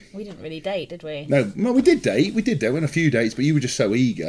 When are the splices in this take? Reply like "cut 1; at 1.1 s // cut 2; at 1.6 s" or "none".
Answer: none